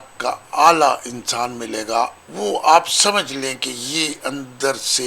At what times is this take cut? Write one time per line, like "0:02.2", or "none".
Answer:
0:02.2

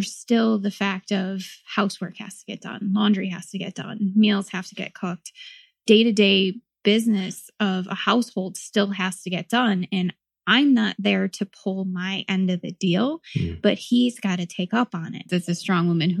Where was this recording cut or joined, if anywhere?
0:15.3

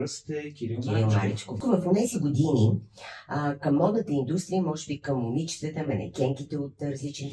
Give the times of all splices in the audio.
0:01.6

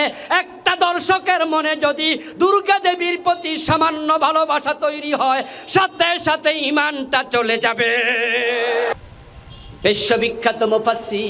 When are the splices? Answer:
0:08.9

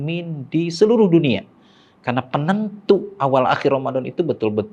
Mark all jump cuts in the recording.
none

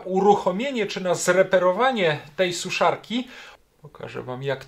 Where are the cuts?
0:03.4

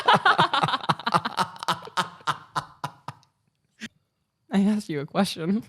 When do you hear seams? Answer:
0:03.9

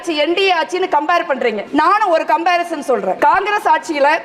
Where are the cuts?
0:01.6
0:03.2

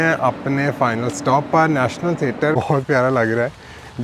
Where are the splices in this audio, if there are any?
0:02.5

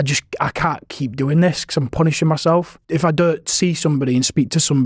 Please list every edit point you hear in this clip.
0:02.8

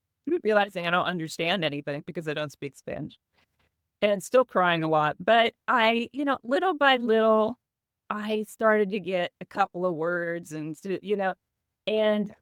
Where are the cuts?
none

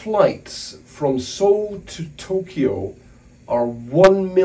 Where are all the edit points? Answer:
none

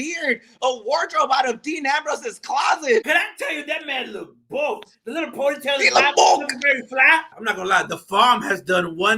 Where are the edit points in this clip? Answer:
0:03.1
0:07.4

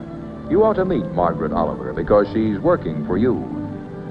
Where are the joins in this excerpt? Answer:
0:03.2

